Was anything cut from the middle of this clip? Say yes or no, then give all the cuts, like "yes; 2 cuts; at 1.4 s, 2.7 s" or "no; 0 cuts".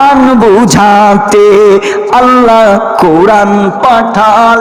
no; 0 cuts